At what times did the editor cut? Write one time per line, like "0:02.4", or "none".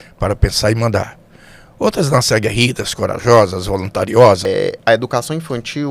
0:04.5

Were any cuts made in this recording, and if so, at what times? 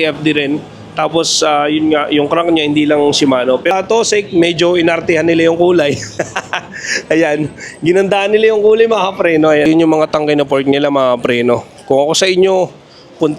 0:03.7
0:09.7

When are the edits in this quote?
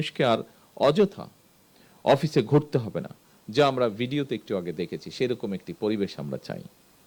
none

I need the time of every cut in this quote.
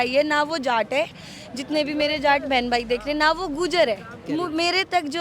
0:04.2

